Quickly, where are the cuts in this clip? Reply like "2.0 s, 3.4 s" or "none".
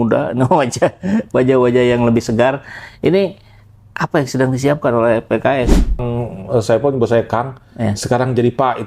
6.0 s